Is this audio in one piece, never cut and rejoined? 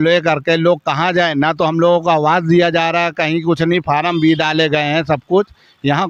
yes; 0 cuts

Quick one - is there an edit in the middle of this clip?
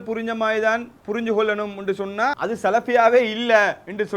yes; 1 cut; at 2.4 s

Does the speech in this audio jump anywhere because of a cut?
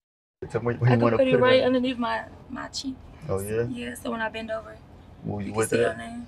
no; 0 cuts

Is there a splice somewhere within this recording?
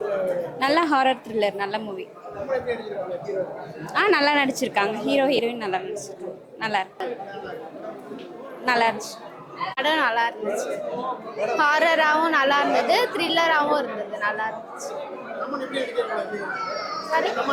yes; 1 cut; at 7.0 s

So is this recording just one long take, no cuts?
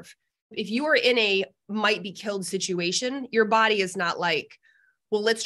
yes; 0 cuts

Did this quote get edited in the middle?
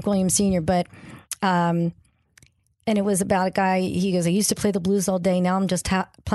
no; 0 cuts

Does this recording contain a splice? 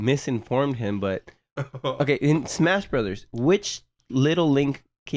no; 0 cuts

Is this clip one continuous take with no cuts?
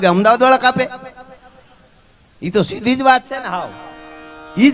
yes; 0 cuts

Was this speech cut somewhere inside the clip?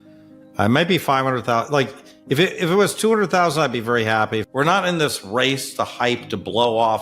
yes; 1 cut; at 4.4 s

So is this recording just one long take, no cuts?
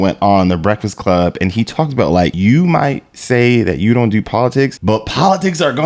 no; 2 cuts; at 2.3 s, 4.8 s

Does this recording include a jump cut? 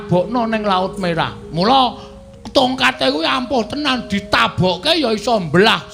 no; 0 cuts

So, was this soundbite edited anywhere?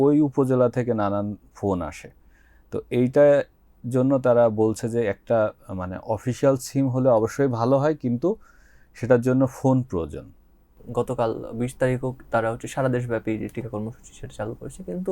yes; 1 cut; at 10.6 s

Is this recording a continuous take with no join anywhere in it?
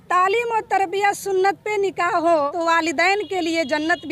no; 1 cut; at 2.5 s

